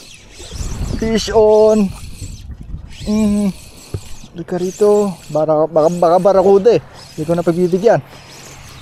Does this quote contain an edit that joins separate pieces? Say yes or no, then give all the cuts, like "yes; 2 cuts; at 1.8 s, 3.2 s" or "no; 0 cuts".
no; 0 cuts